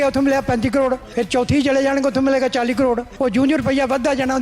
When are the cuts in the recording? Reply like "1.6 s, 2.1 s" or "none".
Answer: 1.1 s, 3.1 s

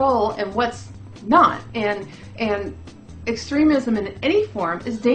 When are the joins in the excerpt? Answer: none

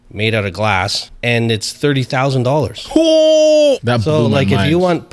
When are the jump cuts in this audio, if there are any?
1.1 s, 3.9 s

